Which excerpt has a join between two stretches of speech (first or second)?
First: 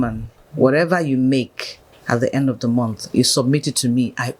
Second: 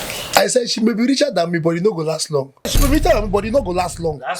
second